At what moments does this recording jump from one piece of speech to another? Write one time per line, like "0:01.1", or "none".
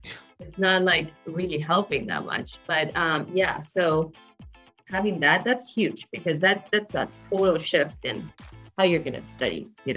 none